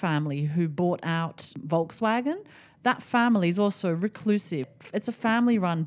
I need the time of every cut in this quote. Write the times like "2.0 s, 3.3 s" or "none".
1.5 s, 4.7 s